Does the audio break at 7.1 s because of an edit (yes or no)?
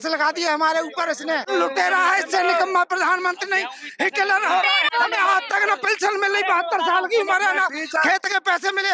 no